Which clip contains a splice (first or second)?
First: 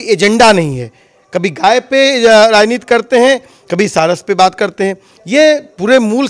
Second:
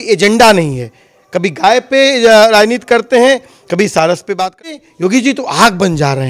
second